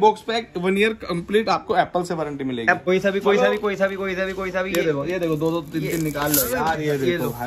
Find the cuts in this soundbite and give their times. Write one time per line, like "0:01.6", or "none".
0:02.8